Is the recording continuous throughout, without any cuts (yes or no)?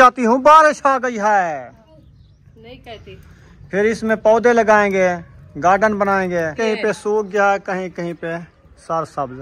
no